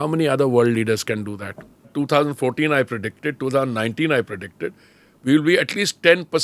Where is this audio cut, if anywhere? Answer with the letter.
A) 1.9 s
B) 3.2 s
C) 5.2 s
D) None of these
A